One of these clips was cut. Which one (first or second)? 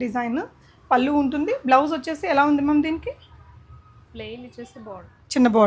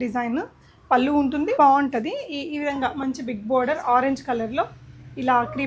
second